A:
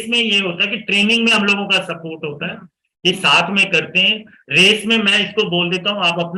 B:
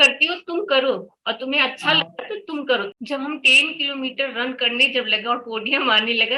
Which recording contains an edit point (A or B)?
B